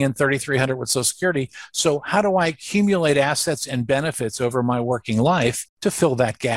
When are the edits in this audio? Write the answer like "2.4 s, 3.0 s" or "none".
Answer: 5.7 s